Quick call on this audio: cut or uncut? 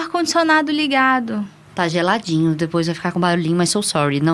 cut